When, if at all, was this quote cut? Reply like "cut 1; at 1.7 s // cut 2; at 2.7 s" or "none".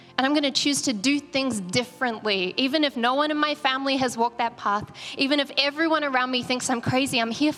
none